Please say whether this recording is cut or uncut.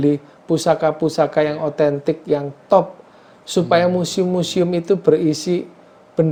uncut